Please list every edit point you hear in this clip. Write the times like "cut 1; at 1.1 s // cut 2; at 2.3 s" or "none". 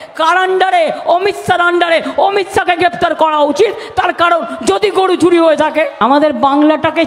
cut 1; at 5.9 s